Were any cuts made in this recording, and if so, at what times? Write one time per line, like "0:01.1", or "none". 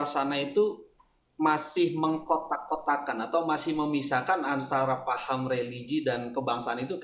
none